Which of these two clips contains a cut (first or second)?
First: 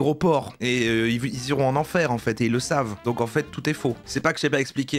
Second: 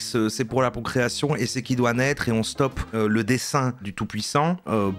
second